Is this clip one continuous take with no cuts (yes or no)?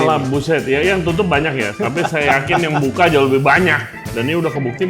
no